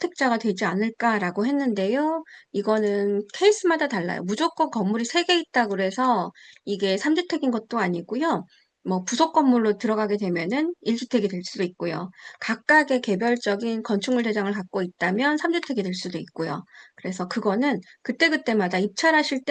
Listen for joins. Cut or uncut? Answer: uncut